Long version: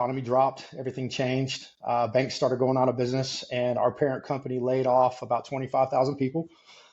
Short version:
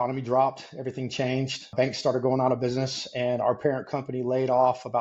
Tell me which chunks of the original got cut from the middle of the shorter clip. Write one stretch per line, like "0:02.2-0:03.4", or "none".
0:01.7-0:02.1